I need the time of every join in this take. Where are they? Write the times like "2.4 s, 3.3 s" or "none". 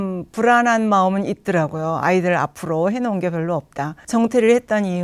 none